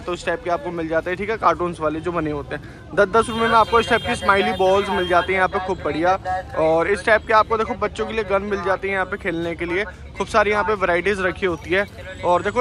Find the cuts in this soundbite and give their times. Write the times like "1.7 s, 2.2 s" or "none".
none